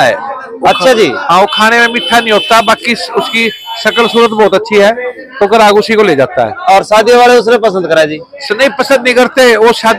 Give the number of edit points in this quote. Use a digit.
1